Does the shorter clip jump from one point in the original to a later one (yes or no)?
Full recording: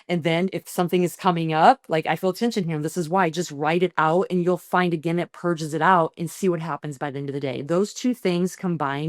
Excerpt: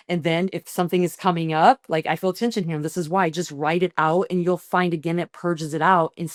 no